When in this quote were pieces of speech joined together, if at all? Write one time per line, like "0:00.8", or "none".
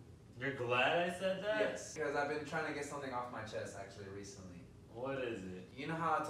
none